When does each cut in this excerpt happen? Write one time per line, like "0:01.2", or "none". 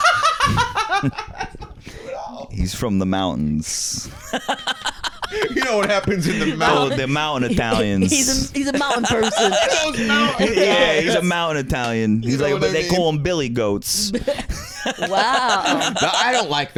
none